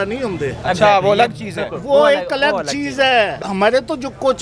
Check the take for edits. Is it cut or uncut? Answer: cut